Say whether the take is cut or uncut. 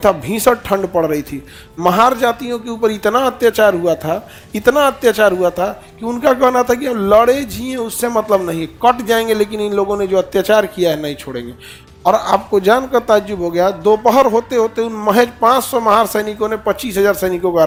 uncut